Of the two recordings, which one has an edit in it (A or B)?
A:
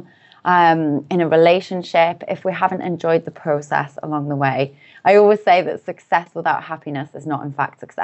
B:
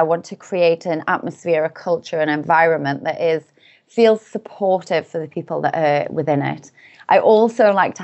A